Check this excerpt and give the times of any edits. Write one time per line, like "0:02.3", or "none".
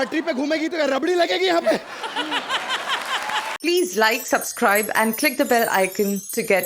0:03.5

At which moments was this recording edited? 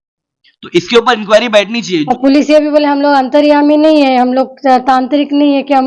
0:01.8

